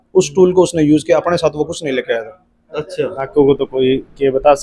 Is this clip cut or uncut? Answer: cut